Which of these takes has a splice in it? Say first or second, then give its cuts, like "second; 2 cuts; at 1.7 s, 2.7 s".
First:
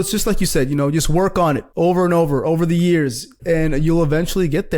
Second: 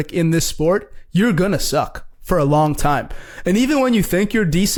first; 2 cuts; at 1.7 s, 3.3 s